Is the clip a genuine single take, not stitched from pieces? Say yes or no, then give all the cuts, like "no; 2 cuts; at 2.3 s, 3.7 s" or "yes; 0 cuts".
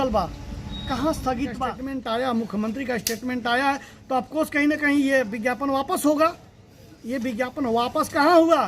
no; 1 cut; at 1.7 s